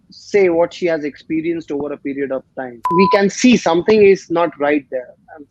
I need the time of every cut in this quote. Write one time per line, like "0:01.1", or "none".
0:02.8

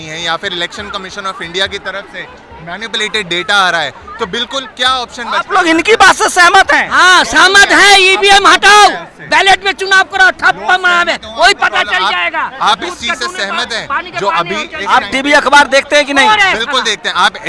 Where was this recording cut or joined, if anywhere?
none

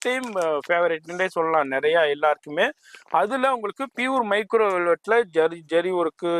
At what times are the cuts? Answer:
none

